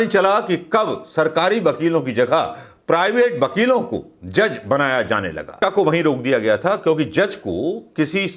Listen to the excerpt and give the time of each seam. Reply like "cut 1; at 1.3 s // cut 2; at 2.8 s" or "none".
cut 1; at 5.6 s